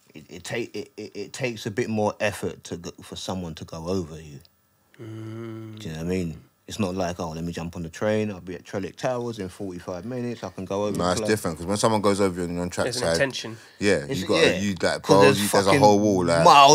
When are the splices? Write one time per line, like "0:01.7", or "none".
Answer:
none

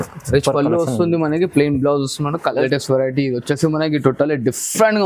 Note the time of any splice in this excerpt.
0:02.6

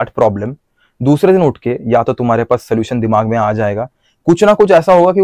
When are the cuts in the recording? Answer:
none

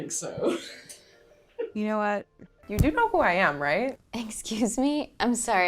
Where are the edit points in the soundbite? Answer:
0:02.6

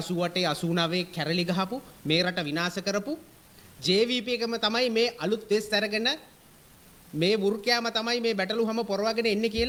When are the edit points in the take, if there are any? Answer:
none

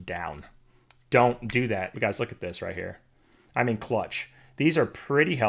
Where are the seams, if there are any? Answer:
0:01.9

